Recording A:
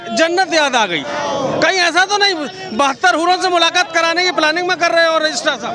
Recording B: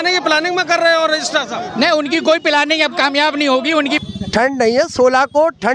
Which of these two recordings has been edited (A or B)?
B